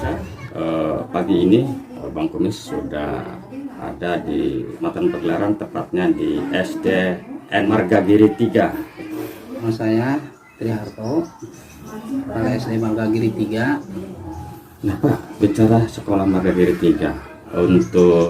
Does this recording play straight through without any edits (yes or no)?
no